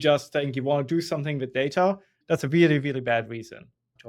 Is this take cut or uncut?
cut